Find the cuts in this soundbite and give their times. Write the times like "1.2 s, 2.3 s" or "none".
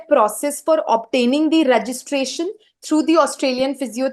none